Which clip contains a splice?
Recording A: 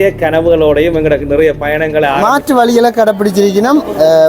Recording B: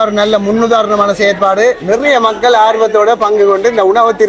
A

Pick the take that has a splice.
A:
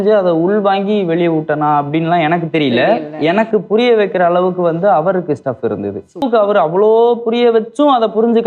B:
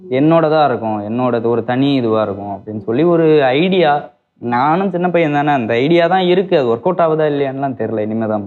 A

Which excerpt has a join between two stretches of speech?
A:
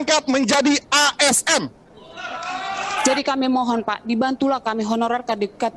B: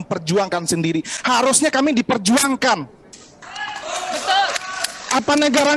A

